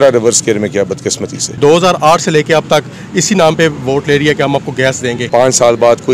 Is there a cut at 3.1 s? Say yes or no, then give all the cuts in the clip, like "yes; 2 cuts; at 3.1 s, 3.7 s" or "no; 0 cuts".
no; 2 cuts; at 1.6 s, 5.3 s